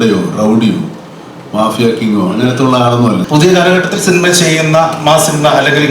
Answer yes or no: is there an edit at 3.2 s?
yes